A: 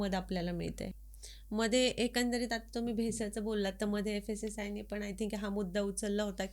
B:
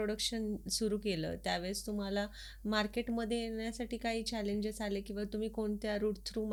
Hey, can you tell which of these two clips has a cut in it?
A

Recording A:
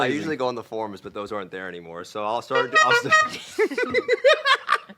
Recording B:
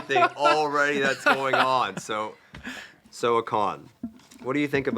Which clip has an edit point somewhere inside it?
B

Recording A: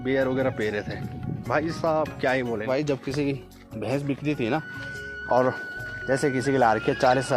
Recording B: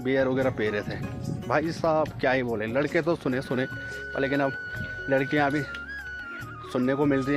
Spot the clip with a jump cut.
A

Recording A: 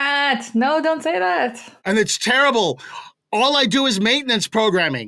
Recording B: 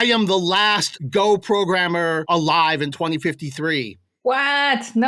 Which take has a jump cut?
B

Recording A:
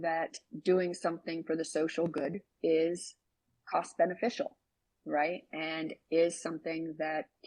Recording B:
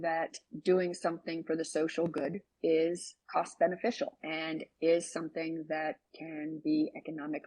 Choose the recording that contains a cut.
B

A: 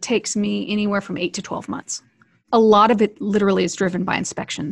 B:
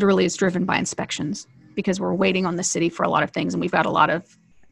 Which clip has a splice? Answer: A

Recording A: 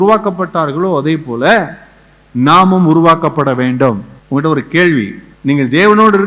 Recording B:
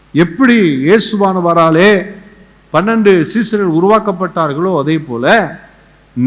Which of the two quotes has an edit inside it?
A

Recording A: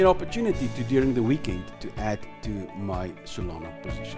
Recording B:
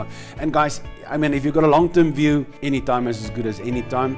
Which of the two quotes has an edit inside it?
B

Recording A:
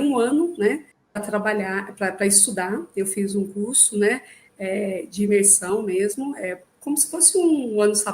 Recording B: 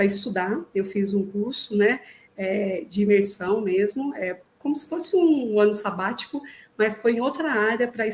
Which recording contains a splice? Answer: A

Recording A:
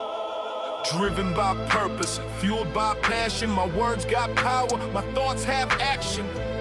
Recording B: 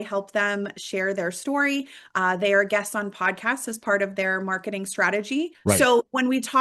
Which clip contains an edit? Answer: B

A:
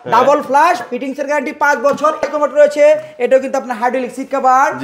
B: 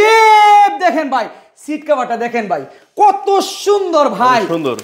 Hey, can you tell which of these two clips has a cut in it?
A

